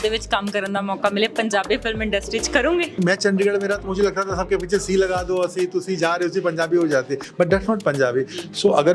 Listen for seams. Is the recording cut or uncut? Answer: cut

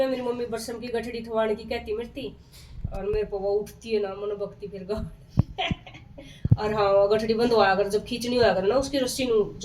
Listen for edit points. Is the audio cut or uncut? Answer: uncut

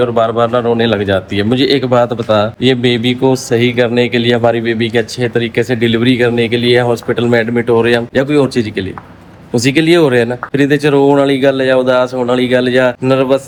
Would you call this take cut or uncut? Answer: uncut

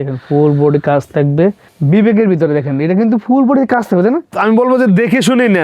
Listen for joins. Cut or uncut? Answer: cut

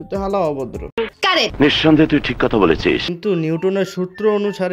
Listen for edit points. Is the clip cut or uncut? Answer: cut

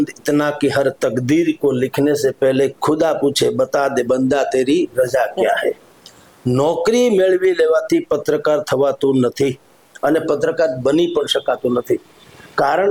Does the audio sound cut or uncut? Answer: uncut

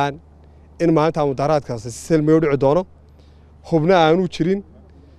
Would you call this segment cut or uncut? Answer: uncut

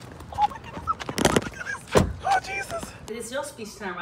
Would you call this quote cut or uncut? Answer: cut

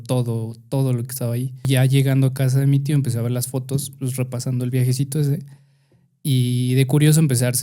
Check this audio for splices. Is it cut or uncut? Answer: cut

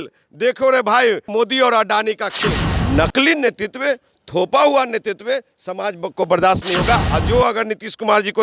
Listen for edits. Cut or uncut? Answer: cut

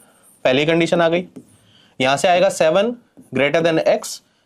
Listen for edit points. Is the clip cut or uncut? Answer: uncut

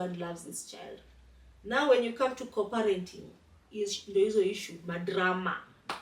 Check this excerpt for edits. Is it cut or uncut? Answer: uncut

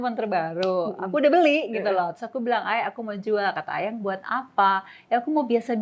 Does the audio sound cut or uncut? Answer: uncut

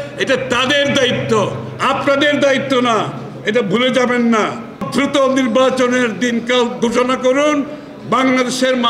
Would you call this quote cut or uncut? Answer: cut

